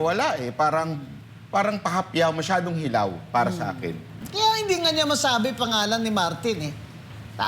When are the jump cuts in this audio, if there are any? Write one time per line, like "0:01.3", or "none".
0:04.2